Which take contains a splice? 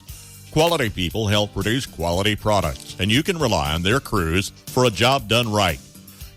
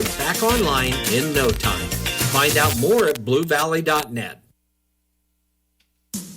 second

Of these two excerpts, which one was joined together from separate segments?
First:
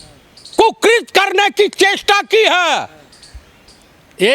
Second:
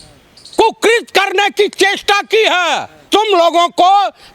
second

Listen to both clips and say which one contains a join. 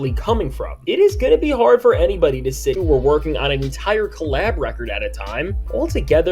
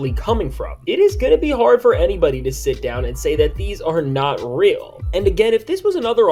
first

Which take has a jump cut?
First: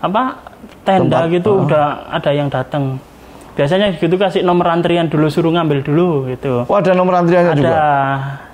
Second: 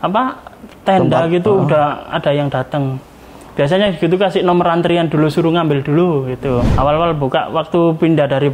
second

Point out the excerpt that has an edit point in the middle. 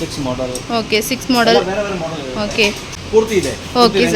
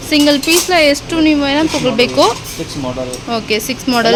first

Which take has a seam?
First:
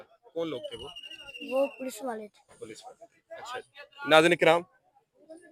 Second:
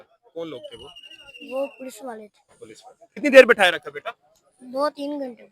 second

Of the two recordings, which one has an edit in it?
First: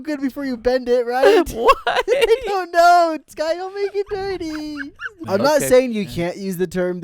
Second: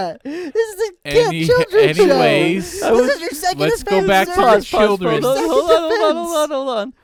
first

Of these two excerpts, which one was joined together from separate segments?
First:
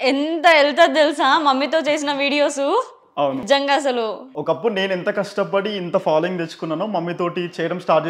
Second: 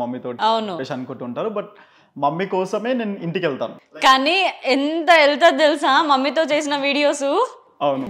second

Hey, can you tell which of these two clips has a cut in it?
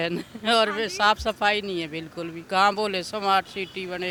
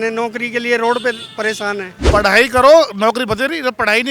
second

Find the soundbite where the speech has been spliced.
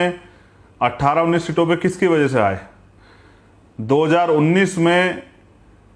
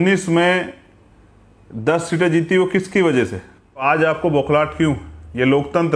second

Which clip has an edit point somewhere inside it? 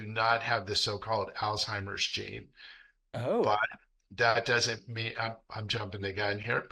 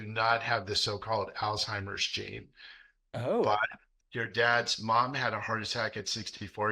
second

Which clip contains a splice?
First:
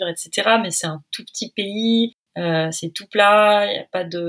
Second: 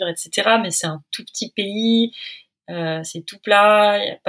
first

